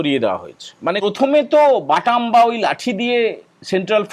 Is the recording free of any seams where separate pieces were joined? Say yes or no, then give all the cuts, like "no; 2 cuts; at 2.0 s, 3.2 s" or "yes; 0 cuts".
no; 1 cut; at 1.0 s